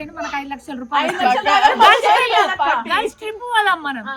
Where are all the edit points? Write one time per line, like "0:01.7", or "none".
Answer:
none